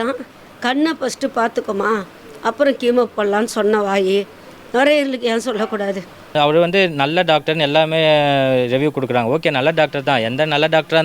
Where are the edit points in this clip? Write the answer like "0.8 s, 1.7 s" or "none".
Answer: 6.3 s

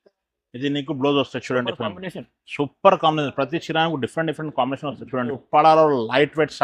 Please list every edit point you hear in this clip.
5.4 s

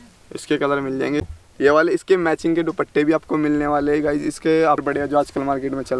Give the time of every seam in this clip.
1.2 s, 4.8 s

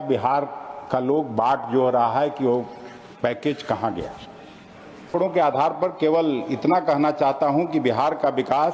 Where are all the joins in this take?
5.1 s

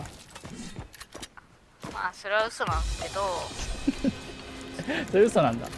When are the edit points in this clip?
none

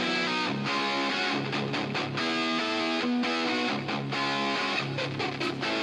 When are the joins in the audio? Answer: 3.6 s

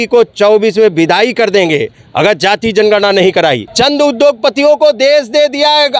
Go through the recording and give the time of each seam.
3.7 s

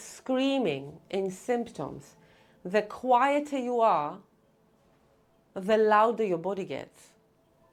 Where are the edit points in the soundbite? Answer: none

